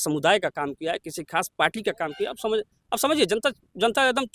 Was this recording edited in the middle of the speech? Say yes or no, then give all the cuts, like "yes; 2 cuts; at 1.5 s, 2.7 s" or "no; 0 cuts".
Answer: no; 0 cuts